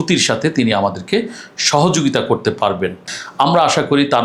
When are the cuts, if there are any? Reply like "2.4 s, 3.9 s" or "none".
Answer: 3.0 s